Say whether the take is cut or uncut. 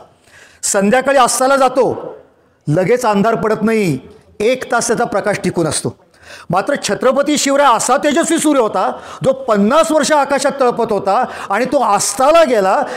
uncut